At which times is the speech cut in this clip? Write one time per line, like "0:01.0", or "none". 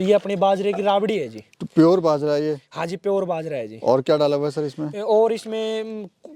none